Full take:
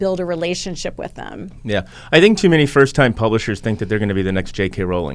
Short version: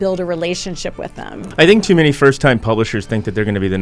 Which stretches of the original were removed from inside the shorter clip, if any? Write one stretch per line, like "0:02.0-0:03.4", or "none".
0:01.4-0:02.0